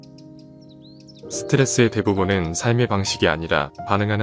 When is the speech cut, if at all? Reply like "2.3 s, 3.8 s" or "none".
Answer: 1.5 s